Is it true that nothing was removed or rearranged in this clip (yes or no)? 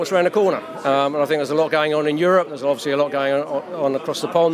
yes